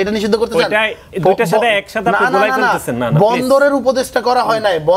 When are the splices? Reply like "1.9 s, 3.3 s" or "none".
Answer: none